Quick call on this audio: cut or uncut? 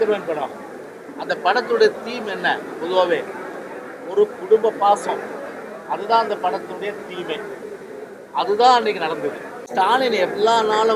cut